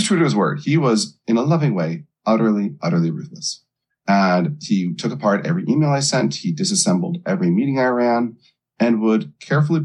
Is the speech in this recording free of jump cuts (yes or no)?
yes